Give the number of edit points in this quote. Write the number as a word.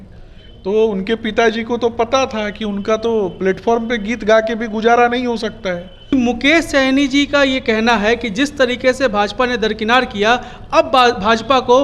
one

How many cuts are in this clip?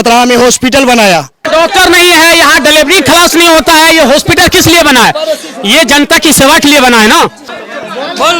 two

